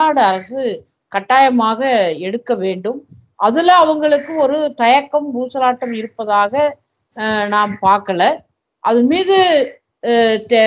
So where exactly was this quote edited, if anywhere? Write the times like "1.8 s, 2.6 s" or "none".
none